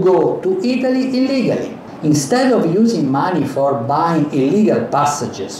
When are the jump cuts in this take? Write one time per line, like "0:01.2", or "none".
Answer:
0:01.8